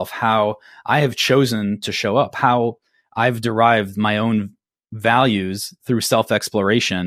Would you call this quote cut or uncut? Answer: uncut